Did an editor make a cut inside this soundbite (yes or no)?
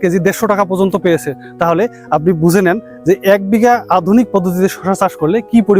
no